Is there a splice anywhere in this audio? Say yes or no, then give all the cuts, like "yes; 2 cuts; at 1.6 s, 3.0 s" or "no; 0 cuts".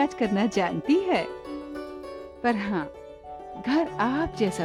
no; 0 cuts